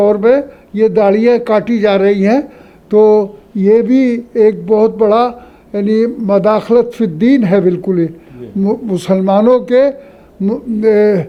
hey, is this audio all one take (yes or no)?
yes